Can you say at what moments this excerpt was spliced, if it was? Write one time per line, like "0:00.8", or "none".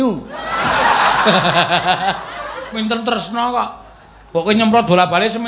0:02.8

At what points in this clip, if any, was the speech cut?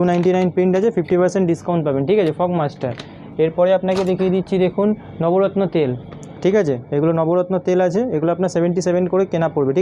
none

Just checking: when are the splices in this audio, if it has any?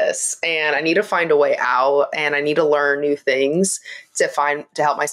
none

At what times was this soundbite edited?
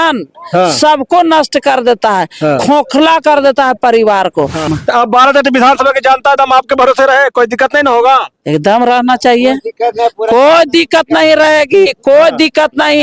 0:04.7

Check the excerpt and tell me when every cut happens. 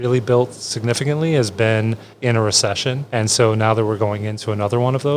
0:03.0

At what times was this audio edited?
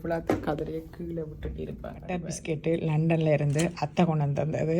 0:02.2

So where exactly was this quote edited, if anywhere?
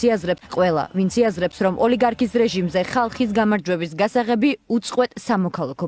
0:01.4

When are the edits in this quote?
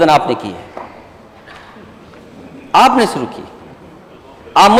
none

